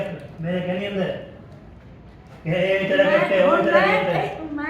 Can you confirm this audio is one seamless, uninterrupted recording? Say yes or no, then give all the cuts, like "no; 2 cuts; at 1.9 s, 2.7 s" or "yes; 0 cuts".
yes; 0 cuts